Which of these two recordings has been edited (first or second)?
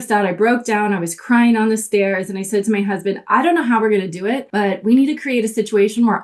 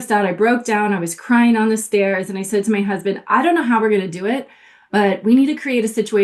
first